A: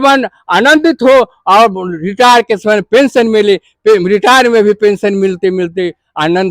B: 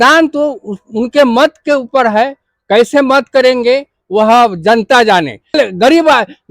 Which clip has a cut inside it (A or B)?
B